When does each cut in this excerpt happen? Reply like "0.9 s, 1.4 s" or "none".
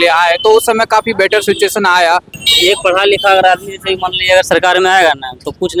2.4 s